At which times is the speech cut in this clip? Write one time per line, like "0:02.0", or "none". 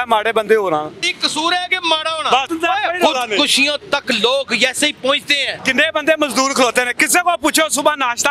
0:01.1
0:02.5
0:05.6